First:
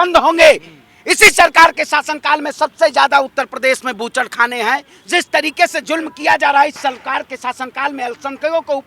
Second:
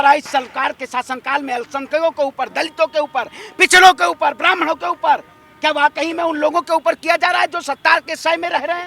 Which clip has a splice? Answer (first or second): first